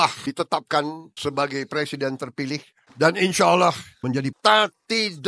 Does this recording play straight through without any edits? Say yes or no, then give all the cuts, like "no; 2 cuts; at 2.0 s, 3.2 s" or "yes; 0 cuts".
no; 2 cuts; at 2.8 s, 4.2 s